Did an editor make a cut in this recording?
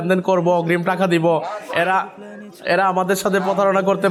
no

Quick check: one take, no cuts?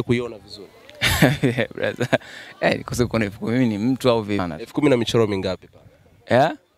no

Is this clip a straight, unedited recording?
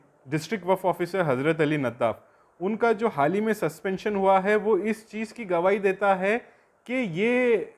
yes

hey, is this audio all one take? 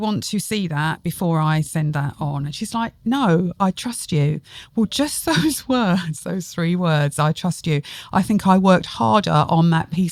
yes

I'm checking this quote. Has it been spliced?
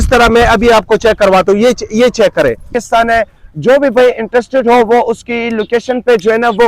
yes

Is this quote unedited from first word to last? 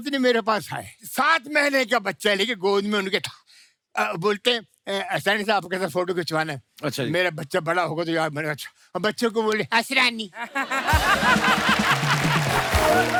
yes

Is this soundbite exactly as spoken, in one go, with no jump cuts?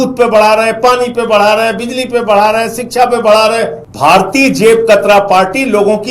no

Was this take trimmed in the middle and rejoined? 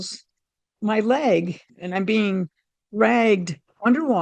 yes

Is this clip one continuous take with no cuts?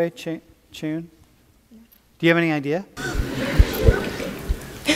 no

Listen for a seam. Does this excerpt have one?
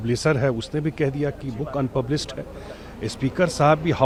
no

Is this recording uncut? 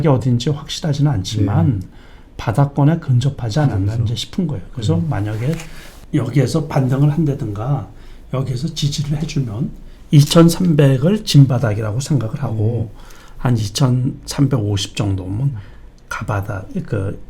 yes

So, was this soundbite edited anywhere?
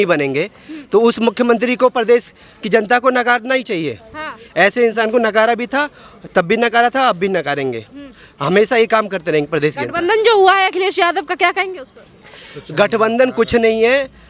no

